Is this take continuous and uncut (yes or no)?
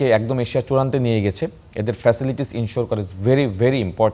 yes